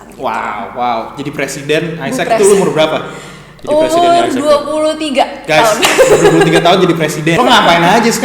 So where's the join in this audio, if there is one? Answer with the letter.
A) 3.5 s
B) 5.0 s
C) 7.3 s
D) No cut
C